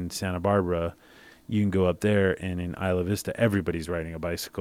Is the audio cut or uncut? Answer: uncut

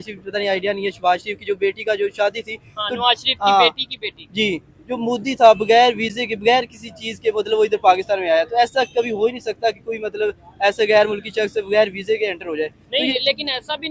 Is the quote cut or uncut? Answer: uncut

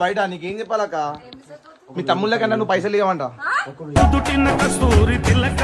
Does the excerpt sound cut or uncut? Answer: uncut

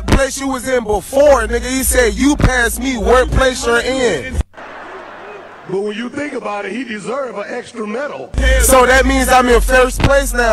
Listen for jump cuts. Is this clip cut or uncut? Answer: cut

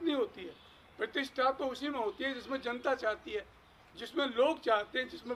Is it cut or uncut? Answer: uncut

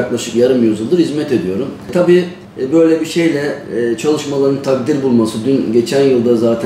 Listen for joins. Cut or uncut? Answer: cut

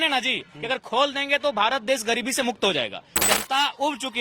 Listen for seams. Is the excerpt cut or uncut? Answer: cut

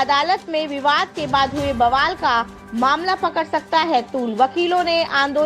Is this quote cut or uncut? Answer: uncut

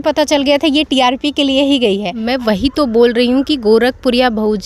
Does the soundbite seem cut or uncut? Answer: cut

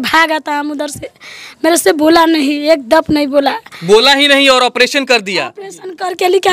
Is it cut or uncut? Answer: uncut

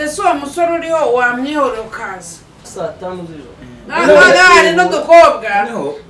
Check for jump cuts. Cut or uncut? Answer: cut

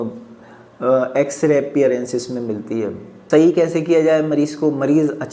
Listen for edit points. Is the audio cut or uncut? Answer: cut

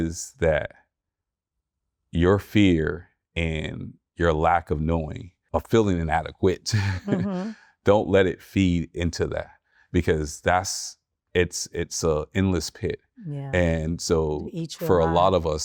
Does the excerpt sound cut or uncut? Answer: uncut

